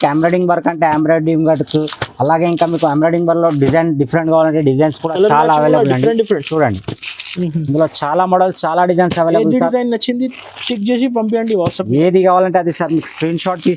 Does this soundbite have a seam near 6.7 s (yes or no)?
no